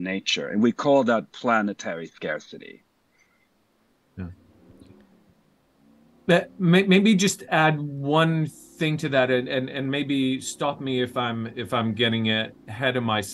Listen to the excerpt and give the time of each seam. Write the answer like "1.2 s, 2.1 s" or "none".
none